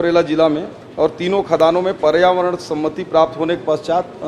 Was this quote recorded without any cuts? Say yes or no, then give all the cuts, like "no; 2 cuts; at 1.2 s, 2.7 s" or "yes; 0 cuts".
yes; 0 cuts